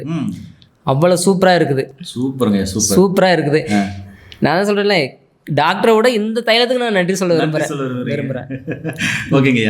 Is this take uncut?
yes; 0 cuts

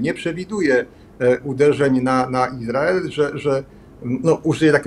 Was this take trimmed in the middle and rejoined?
no; 0 cuts

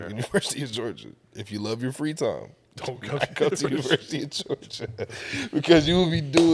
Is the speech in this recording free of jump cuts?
yes; 0 cuts

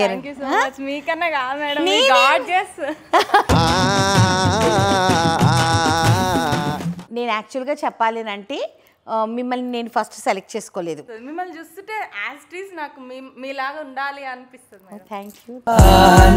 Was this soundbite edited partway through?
yes; 2 cuts; at 7.0 s, 11.1 s

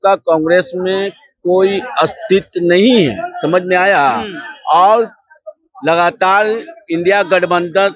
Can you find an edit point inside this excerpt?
no; 0 cuts

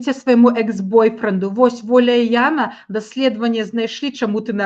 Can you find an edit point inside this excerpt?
no; 0 cuts

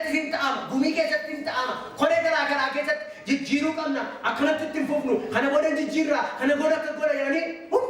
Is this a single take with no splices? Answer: yes; 0 cuts

